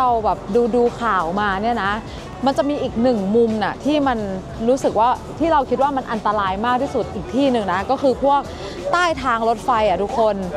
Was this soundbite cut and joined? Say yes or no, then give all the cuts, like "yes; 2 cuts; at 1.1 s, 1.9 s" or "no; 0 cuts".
no; 0 cuts